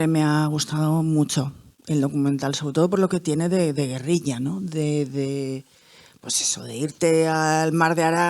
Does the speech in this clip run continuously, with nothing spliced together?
yes; 0 cuts

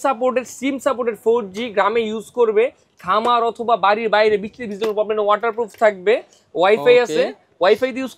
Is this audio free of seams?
yes; 0 cuts

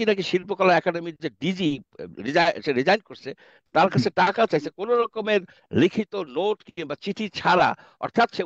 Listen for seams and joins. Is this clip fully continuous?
yes; 0 cuts

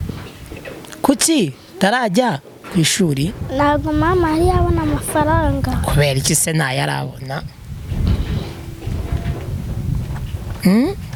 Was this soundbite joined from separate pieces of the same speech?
no; 0 cuts

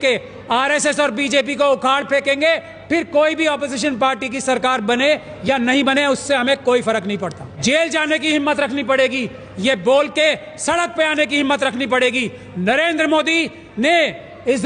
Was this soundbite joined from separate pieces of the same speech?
yes; 1 cut; at 7.5 s

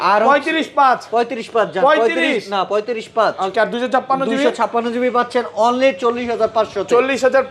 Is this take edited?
no; 0 cuts

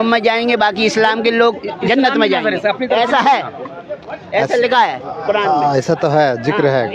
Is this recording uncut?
yes; 0 cuts

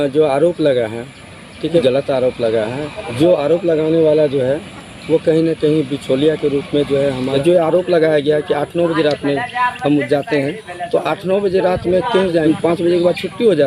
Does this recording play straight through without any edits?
no; 4 cuts; at 1.8 s, 3.0 s, 7.4 s, 12.4 s

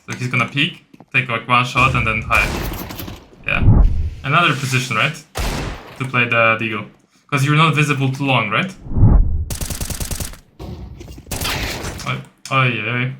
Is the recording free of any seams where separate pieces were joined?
no; 2 cuts; at 3.8 s, 9.3 s

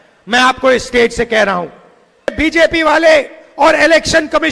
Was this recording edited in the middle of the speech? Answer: yes; 1 cut; at 2.3 s

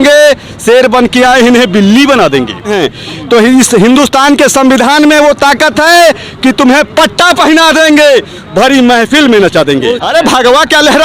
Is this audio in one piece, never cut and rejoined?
no; 2 cuts; at 2.7 s, 10.0 s

